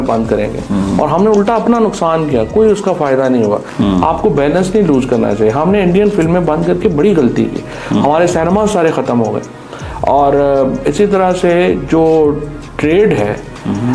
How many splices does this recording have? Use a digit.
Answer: 0